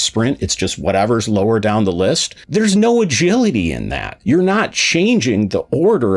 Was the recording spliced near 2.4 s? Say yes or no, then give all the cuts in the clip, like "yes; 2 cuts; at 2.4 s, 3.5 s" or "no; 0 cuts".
no; 0 cuts